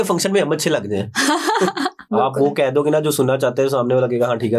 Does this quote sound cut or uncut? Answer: cut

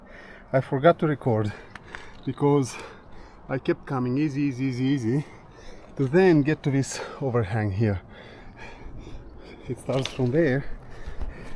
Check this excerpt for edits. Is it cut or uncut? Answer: uncut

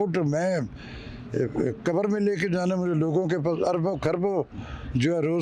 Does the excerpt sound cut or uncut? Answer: uncut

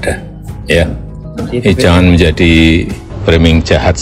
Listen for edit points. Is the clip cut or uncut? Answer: cut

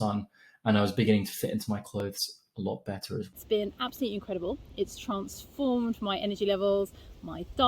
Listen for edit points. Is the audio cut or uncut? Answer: cut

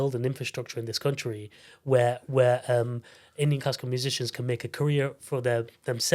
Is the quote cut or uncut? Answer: uncut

